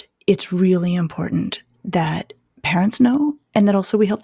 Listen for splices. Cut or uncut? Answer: uncut